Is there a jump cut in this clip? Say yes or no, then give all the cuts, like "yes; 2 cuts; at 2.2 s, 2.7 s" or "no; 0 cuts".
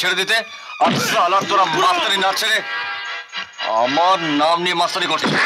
no; 0 cuts